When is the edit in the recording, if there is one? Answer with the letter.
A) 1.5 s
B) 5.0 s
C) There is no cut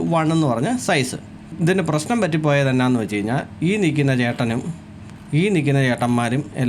A